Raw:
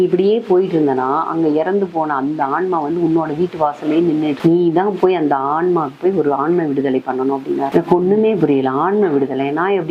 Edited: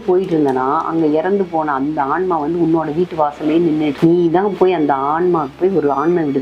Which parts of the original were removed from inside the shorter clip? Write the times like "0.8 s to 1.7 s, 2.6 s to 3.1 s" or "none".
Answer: none